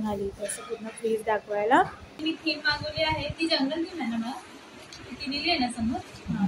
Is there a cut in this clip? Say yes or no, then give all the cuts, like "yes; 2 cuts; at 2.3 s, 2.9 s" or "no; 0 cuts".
yes; 1 cut; at 2.1 s